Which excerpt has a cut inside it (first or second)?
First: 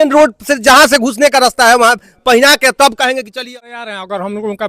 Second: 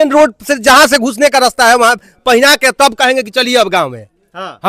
first